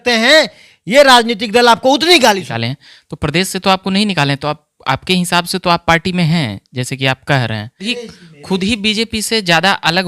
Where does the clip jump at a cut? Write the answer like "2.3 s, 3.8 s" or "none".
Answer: 2.5 s, 7.9 s